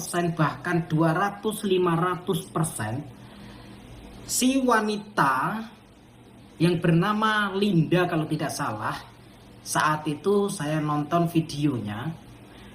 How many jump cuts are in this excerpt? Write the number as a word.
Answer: zero